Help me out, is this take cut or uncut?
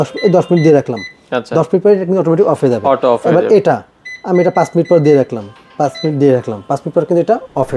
uncut